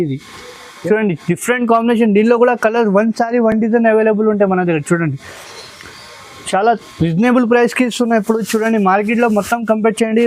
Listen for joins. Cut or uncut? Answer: uncut